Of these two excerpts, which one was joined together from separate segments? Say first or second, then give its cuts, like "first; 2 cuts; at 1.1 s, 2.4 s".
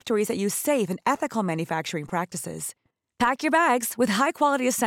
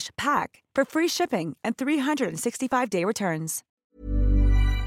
second; 1 cut; at 3.6 s